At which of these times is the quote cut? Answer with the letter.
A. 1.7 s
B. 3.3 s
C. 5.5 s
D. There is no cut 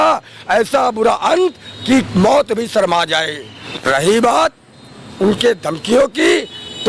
B